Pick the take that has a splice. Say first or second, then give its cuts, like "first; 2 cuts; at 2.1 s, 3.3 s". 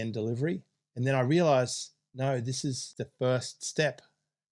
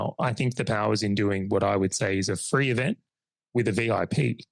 first; 1 cut; at 2.8 s